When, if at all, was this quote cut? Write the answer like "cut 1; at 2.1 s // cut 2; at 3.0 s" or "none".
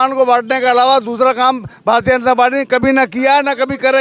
none